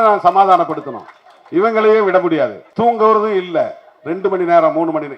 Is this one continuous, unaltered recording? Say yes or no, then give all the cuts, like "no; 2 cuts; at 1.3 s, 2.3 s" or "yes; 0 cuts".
no; 1 cut; at 2.6 s